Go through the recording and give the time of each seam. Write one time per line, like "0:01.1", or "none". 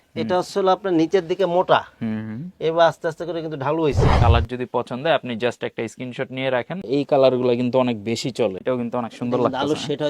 0:04.2
0:06.8
0:08.6